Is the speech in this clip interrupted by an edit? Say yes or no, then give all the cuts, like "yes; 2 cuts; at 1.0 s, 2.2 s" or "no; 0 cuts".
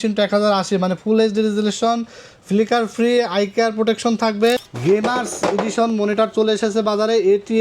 yes; 1 cut; at 4.7 s